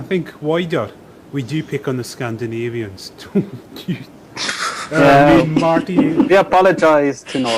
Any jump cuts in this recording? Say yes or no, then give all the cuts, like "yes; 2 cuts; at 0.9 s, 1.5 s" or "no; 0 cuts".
yes; 1 cut; at 5.7 s